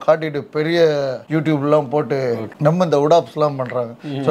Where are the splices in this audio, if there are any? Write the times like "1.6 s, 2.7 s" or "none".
1.2 s, 2.4 s